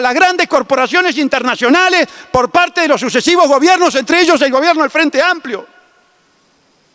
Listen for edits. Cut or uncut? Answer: uncut